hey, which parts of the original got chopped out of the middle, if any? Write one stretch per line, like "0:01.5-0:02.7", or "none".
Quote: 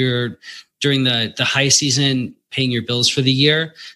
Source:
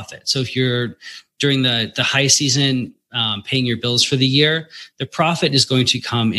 0:03.0-0:03.4